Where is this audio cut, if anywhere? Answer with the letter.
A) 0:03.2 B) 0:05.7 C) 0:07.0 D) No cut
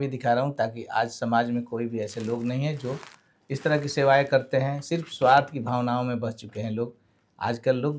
D